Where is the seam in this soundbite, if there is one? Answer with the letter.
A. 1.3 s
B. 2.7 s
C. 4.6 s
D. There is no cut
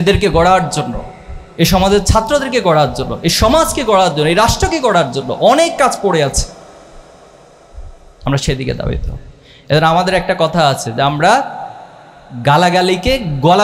D